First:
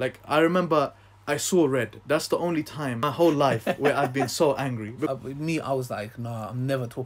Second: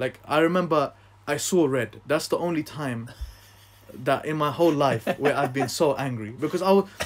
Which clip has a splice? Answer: first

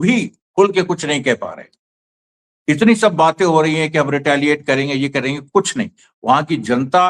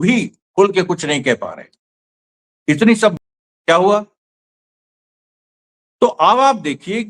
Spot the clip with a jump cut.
second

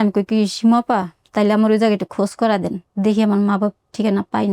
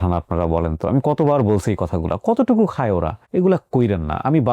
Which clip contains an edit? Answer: second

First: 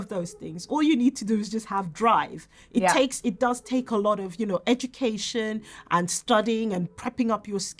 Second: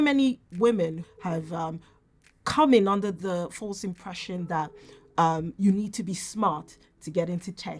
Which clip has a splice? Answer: second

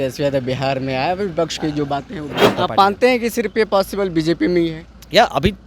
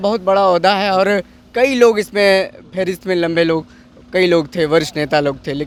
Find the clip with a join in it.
first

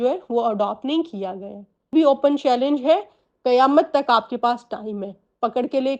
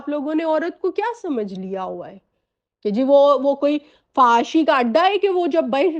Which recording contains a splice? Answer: first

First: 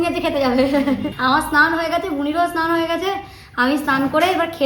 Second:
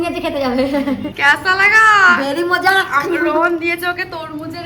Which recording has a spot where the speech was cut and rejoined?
second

